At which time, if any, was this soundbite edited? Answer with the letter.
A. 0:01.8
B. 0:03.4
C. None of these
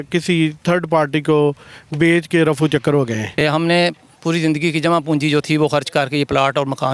B